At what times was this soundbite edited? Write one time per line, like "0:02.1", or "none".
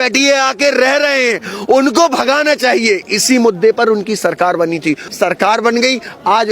0:05.1